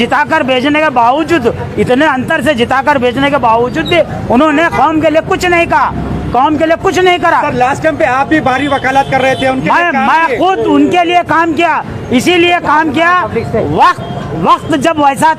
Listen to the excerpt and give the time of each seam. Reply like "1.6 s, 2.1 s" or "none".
none